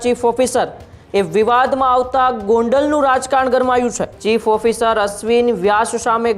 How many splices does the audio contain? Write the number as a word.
one